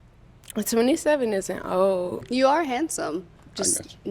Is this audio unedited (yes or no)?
no